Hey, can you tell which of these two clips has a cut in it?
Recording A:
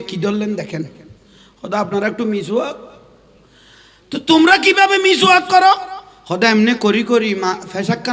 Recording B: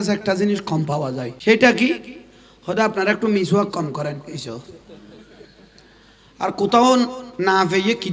B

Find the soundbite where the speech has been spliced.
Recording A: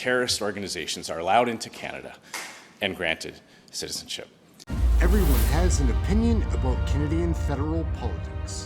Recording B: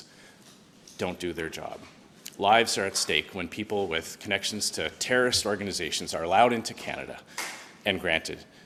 A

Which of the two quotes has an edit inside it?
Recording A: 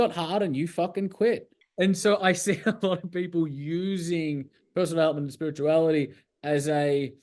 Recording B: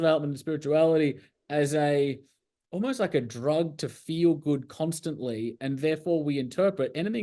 A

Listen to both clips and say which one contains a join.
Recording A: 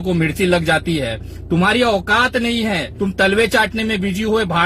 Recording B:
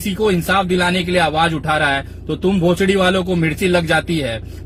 A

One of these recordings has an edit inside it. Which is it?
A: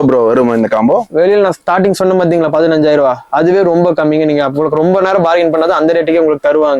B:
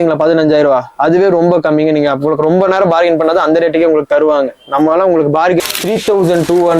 B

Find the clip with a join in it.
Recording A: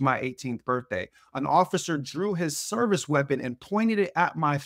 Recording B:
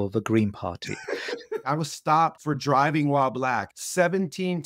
B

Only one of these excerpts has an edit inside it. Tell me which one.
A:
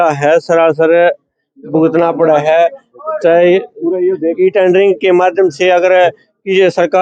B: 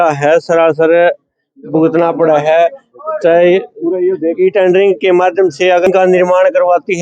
B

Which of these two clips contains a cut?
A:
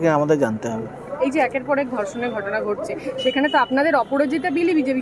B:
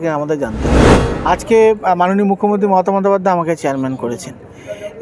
B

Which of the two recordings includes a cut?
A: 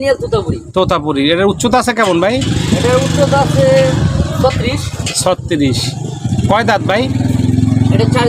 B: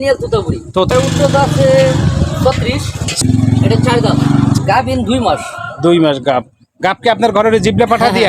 B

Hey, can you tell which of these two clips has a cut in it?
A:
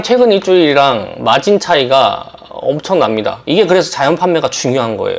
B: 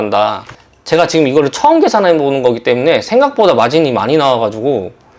A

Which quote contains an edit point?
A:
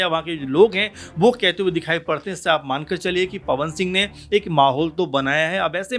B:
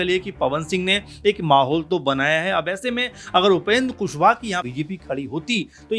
B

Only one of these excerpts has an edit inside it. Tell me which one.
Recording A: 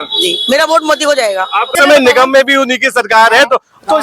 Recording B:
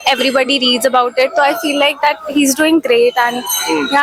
A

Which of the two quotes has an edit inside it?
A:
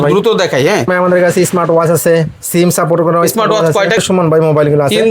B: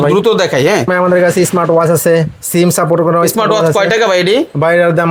A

